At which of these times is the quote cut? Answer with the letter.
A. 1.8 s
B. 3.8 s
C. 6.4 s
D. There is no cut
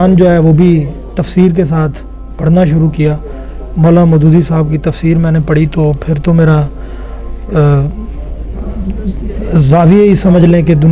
D